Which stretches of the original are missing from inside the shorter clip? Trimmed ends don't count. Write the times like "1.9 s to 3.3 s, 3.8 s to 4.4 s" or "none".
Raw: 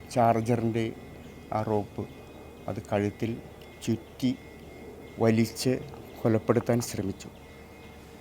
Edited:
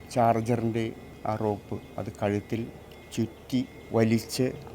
1.1 s to 1.3 s, 2.1 s to 2.6 s, 4.5 s to 5.0 s